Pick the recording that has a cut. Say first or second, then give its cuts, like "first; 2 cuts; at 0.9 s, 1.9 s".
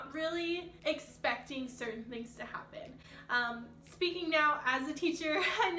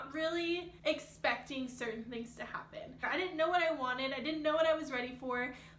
second; 1 cut; at 3.0 s